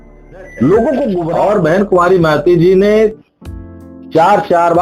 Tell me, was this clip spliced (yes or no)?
yes